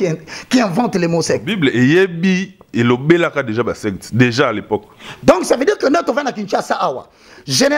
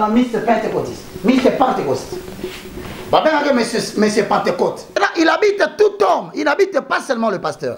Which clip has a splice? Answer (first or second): second